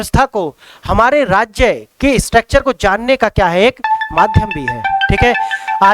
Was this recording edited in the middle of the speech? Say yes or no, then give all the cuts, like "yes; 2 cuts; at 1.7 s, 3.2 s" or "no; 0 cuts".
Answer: no; 0 cuts